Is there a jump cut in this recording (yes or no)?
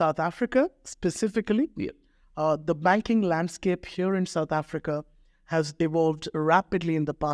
no